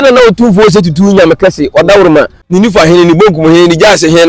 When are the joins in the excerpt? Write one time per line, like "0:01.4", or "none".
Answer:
0:02.4